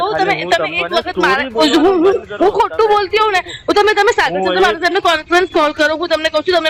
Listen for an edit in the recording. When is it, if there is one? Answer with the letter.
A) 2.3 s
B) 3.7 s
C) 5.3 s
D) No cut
D